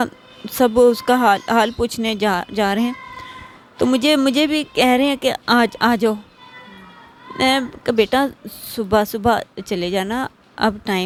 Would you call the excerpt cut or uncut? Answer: uncut